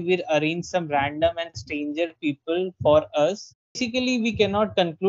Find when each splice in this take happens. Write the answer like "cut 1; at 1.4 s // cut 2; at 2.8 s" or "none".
cut 1; at 3.8 s